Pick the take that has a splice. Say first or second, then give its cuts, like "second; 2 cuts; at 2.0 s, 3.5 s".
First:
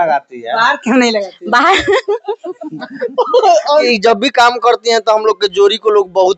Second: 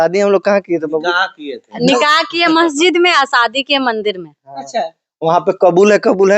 first; 1 cut; at 3.9 s